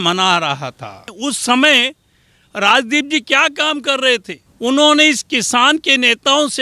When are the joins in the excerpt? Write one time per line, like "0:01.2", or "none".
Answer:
0:01.1
0:04.4